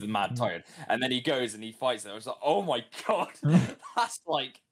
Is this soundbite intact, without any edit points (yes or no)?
yes